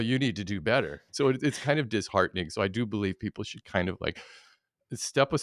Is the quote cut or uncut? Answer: cut